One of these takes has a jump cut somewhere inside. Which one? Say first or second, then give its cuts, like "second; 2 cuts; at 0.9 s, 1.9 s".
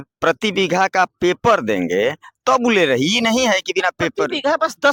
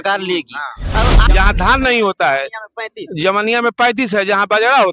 second; 1 cut; at 1.2 s